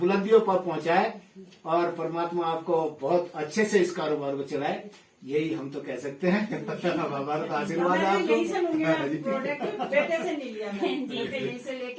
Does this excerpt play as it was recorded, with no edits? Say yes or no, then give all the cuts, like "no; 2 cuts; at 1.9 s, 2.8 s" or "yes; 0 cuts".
yes; 0 cuts